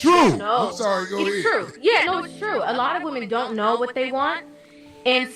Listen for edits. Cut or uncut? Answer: uncut